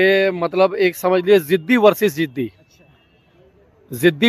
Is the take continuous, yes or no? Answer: yes